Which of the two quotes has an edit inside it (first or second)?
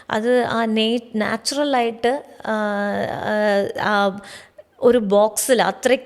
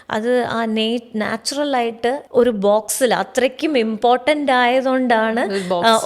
second